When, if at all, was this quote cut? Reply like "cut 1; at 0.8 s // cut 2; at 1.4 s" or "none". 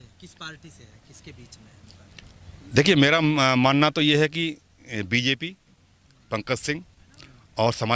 none